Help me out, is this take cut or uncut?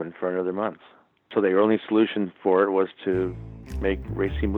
cut